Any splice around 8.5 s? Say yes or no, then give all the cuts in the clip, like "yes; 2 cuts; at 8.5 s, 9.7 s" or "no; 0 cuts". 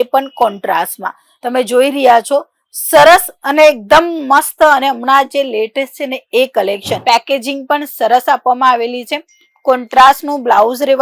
no; 1 cut; at 7.0 s